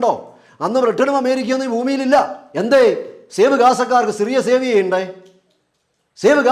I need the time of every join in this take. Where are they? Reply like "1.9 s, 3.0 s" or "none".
2.4 s